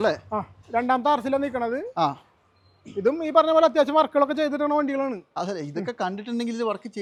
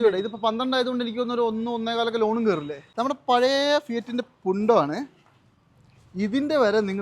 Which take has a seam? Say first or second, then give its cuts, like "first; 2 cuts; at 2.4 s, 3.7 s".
second; 1 cut; at 2.8 s